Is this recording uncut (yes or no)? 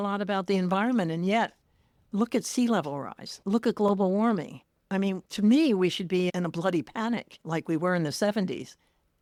yes